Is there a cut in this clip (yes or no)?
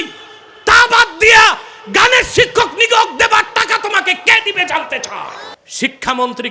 yes